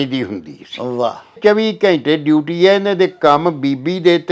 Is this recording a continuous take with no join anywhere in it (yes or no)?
no